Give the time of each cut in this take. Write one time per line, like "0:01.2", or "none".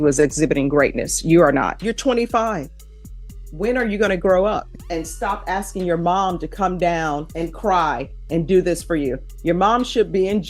0:01.8
0:04.8
0:07.3

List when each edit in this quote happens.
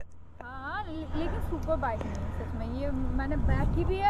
none

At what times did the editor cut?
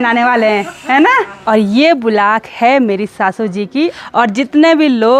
0:01.3
0:04.0

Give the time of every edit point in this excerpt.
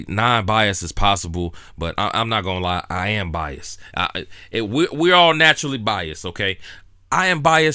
none

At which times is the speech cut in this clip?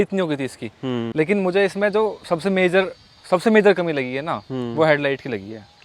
0:01.1

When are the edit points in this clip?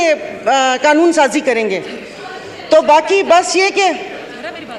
none

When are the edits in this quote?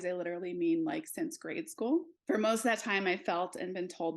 0:02.1

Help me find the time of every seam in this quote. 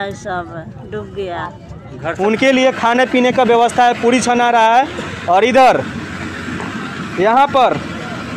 0:02.0

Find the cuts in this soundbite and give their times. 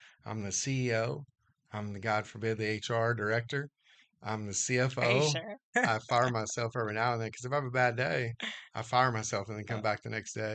0:05.6

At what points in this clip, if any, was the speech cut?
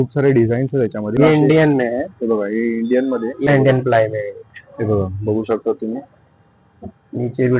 0:01.2
0:03.5

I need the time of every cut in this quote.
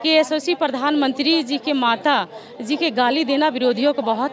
none

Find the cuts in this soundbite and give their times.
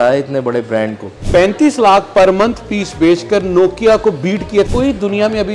0:01.2
0:04.7

